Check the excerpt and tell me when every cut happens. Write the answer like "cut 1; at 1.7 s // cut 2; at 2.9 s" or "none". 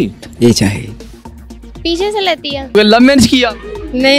cut 1; at 2.8 s